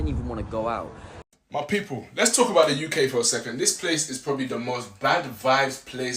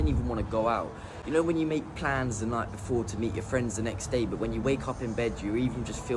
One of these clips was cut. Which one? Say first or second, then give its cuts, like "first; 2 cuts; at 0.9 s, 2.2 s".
first; 1 cut; at 1.1 s